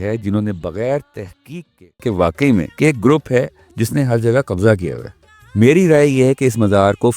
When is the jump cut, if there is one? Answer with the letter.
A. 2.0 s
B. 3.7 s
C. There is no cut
A